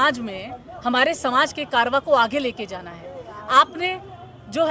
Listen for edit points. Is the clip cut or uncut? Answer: uncut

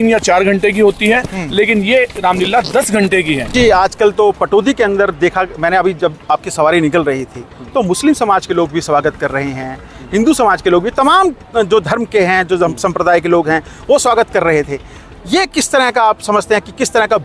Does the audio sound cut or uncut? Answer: cut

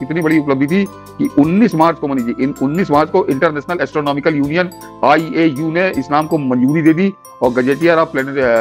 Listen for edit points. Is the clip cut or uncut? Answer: uncut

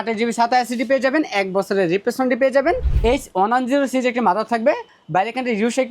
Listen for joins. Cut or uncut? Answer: cut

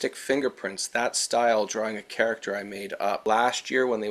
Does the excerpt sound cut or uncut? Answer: cut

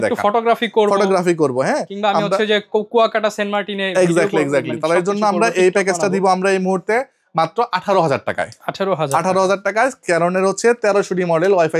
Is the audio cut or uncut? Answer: uncut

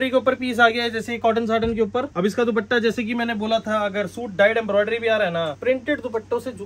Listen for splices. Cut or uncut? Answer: cut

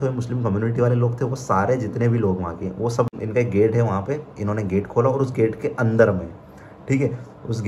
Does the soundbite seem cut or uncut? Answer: cut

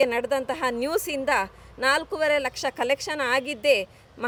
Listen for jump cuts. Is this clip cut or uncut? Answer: uncut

